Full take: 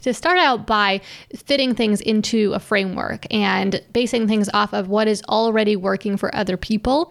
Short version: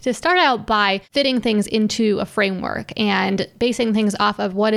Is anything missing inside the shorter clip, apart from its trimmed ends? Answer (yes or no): yes